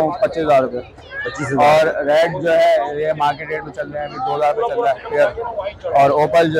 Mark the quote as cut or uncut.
uncut